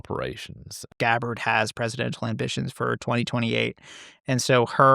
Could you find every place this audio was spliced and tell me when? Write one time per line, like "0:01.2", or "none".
0:00.9